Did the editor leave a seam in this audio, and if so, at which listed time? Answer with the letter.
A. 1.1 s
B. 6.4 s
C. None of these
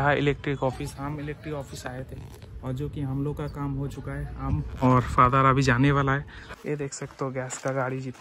B